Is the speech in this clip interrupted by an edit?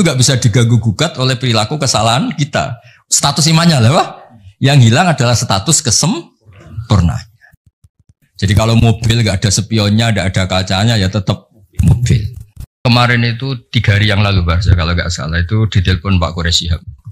yes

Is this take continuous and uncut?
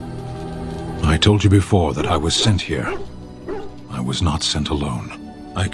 no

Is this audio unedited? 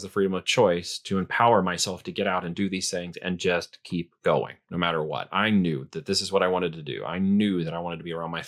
yes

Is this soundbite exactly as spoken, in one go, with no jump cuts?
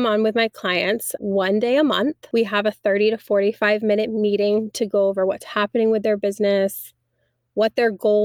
no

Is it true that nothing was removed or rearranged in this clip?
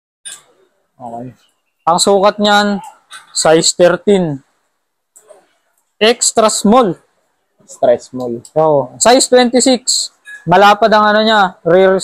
yes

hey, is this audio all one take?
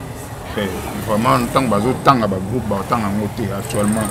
yes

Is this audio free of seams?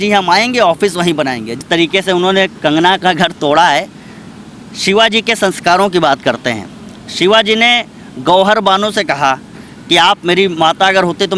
no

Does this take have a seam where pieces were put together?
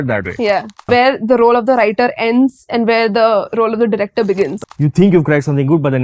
yes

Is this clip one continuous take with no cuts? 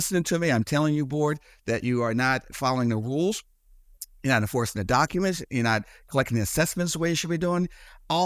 yes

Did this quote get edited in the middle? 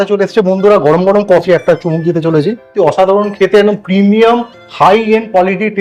yes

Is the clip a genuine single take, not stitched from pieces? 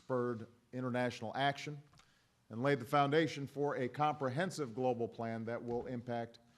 no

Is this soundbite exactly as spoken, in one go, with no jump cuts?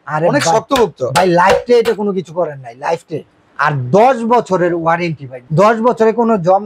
no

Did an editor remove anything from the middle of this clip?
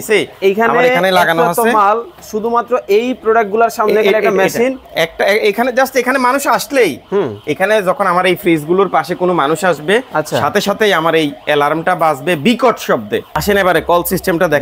yes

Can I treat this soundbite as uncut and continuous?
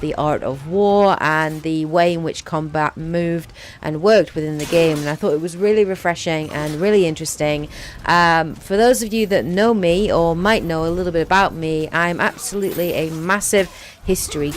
no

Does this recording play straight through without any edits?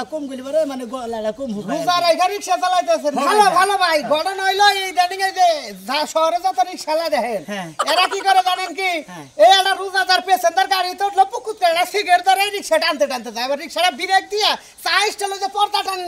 yes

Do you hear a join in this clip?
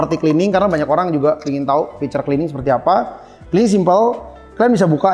no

